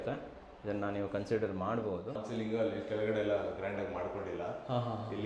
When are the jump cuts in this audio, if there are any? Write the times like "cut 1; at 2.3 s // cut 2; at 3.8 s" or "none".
cut 1; at 2.2 s